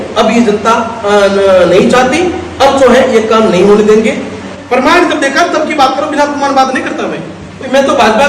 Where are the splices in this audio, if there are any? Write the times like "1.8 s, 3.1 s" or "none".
4.4 s